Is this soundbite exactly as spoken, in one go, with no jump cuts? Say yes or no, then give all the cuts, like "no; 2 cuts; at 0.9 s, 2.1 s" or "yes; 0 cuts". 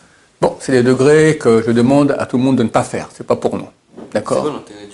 yes; 0 cuts